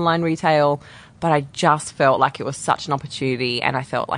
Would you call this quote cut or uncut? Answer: uncut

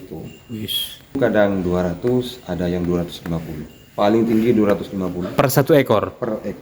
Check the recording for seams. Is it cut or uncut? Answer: cut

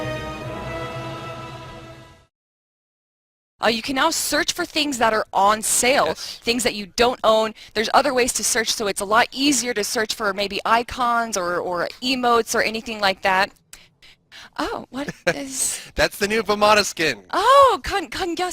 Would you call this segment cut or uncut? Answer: cut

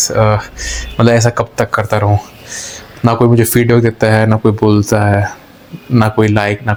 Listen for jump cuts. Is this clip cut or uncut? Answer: uncut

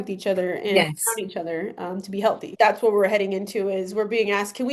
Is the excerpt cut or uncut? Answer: cut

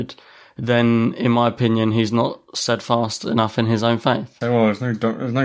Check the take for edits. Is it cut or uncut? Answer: cut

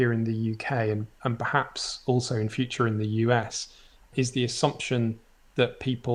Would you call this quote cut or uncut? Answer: uncut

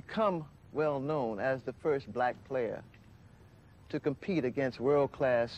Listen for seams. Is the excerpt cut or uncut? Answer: uncut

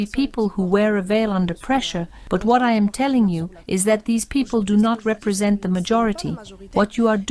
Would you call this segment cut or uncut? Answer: uncut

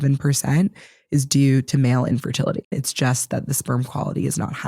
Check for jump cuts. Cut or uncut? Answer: cut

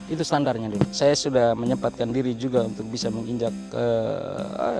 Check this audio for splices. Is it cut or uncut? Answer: cut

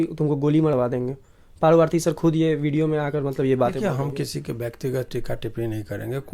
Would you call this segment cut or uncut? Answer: uncut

